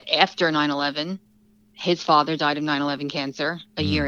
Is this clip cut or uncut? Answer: uncut